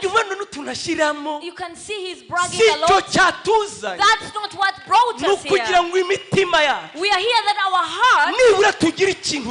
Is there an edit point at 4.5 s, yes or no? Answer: no